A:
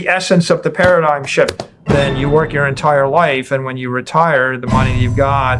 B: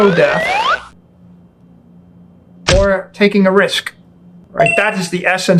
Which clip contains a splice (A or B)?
A